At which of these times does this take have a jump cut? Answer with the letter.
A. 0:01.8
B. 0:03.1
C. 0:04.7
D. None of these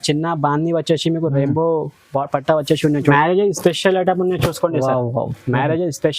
B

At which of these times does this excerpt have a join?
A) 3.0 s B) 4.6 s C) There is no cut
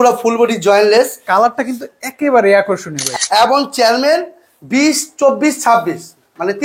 A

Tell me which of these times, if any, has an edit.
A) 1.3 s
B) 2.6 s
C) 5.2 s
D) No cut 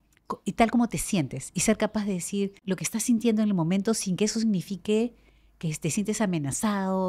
B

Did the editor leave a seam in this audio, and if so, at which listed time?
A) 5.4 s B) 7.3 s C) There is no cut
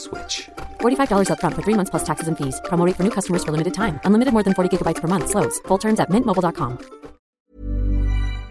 B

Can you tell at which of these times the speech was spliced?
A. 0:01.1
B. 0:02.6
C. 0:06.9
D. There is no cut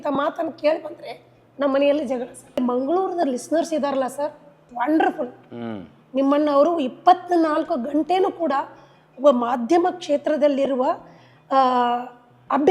B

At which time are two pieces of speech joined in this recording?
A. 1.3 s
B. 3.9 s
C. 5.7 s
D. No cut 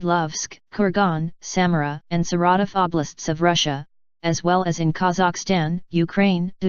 B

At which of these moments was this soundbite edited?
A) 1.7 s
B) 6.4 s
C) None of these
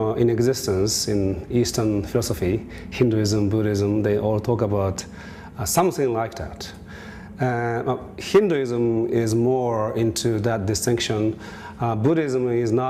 C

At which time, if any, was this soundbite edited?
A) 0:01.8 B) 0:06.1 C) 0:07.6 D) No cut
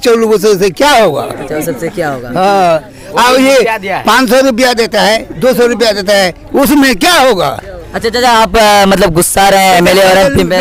D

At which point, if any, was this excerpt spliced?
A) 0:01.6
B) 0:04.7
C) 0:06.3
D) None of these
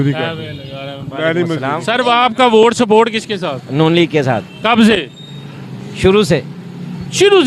A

